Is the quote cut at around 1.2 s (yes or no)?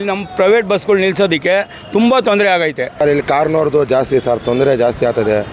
no